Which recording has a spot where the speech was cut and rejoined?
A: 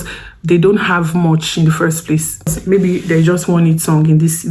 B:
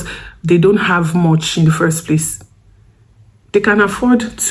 A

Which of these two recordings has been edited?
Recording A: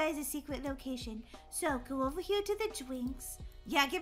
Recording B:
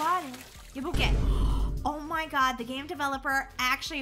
B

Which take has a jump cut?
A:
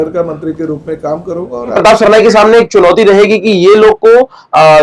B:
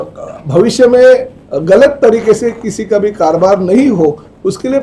A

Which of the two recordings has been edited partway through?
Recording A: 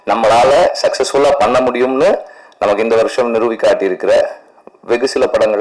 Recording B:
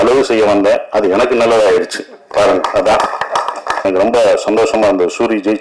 B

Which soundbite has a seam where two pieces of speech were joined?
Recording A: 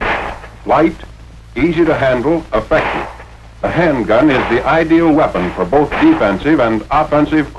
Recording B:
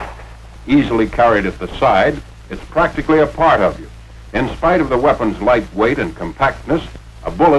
B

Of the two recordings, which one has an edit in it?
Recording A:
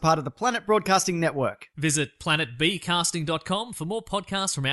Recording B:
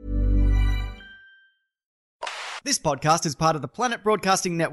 B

